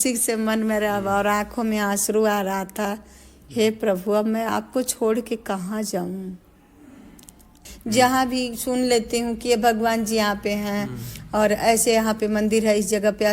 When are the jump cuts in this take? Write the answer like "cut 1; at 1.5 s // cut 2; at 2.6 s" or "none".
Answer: cut 1; at 7.6 s